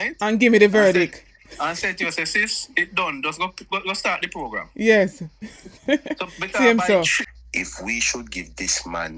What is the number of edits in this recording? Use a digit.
1